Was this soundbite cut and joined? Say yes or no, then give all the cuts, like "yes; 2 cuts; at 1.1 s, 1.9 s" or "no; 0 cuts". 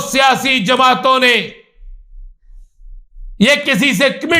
no; 0 cuts